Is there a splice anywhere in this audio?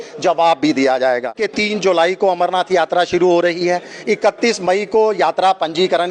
yes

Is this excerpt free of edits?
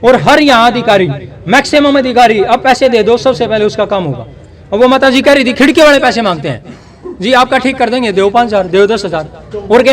yes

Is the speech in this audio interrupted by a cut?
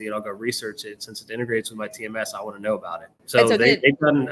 yes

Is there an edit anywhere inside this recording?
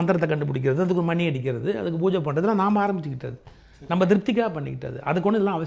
no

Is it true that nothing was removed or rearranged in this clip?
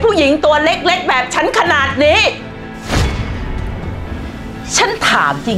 yes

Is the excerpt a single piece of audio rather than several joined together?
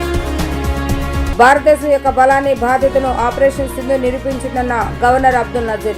no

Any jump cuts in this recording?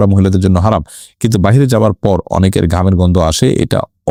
no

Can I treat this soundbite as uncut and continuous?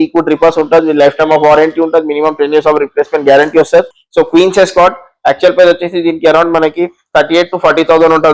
yes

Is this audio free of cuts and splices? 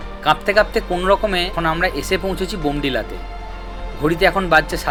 yes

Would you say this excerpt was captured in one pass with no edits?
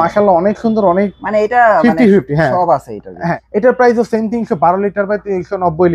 no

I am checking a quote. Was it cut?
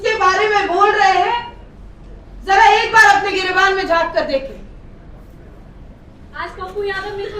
no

